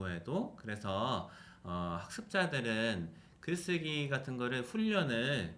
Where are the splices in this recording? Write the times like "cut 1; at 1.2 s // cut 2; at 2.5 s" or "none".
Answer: none